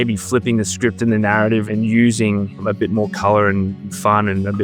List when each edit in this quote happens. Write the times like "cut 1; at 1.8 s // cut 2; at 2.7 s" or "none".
cut 1; at 1.7 s // cut 2; at 2.6 s // cut 3; at 3.8 s